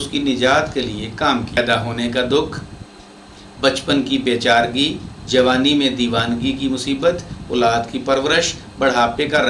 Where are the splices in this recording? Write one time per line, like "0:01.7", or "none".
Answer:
0:01.6